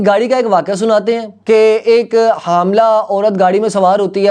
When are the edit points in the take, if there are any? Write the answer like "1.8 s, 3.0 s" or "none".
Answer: 1.3 s